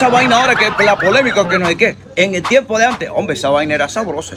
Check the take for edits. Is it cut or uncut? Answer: uncut